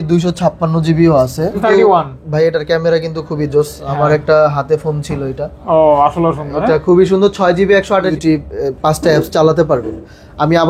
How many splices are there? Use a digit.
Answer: 2